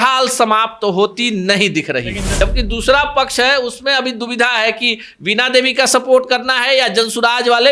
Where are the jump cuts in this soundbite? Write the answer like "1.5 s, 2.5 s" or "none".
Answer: 2.3 s